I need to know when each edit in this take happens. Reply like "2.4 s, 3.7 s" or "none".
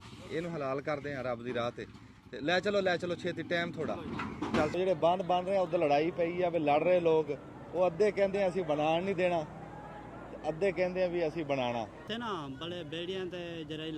4.7 s, 12.0 s